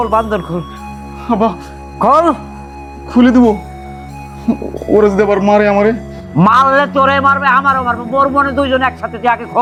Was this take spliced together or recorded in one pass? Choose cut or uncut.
uncut